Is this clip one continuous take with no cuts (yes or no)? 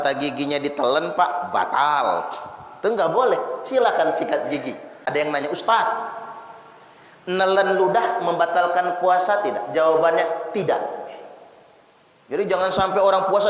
no